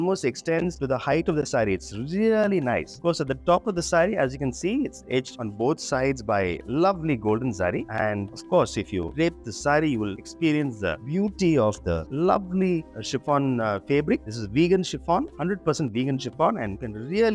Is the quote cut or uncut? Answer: uncut